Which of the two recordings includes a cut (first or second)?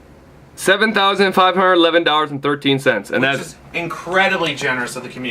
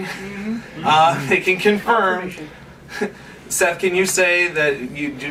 first